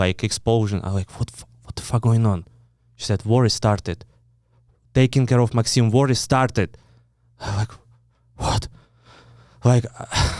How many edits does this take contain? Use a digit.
0